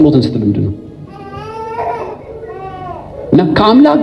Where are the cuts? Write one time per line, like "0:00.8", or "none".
none